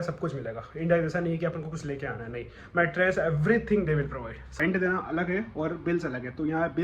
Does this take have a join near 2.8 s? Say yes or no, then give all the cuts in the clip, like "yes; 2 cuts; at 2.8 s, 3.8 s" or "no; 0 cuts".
no; 1 cut; at 4.6 s